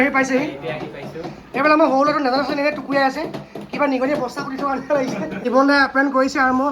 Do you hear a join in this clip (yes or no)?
yes